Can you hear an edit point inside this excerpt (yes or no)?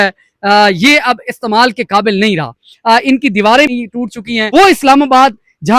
yes